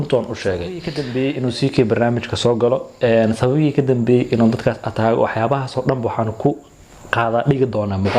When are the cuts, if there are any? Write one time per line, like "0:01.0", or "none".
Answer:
0:00.9